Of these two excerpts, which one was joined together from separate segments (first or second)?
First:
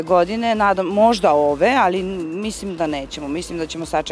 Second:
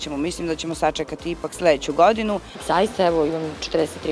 second